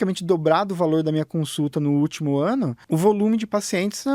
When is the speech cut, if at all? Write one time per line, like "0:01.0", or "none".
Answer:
0:02.8